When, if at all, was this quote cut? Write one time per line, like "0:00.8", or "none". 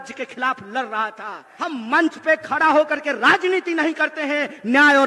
0:01.2